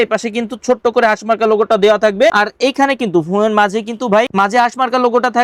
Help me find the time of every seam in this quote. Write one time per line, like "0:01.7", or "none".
none

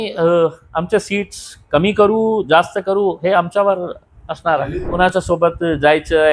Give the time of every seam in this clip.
0:04.9

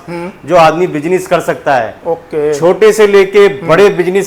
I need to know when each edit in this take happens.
none

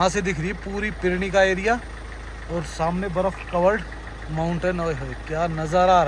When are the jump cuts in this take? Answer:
none

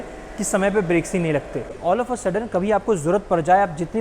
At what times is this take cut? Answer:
0:01.7

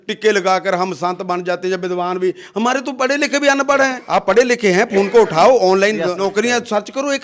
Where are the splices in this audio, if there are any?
0:04.0
0:06.2

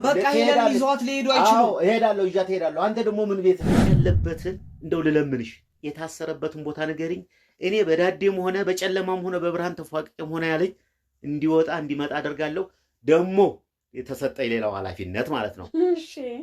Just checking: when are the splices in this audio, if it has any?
0:03.9

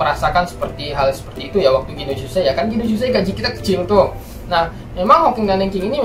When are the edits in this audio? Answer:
none

